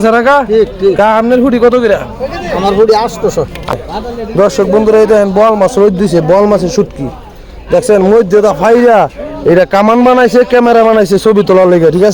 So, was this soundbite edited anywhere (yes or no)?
yes